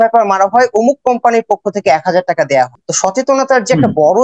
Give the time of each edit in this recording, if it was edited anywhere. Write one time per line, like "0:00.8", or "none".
0:02.8

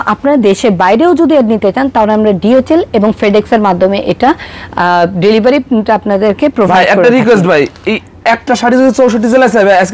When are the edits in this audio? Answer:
none

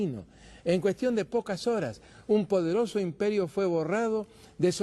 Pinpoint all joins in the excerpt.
0:01.6

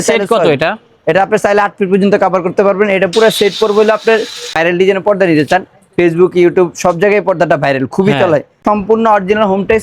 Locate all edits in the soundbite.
0:04.5
0:08.6

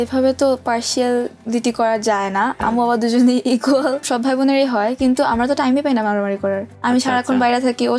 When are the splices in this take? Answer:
0:02.6
0:04.0
0:06.7

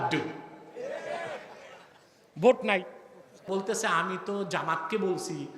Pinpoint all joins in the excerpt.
0:03.5

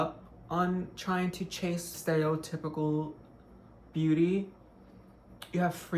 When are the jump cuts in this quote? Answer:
0:02.0

